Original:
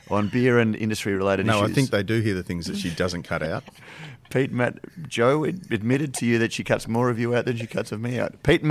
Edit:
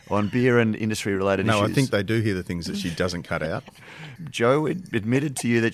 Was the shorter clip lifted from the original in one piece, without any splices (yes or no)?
no